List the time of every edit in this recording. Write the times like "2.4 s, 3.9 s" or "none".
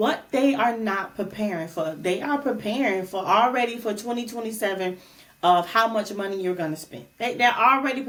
none